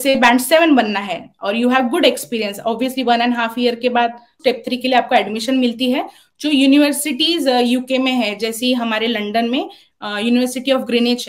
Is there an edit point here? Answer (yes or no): yes